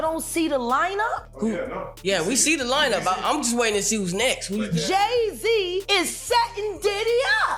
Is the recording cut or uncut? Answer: cut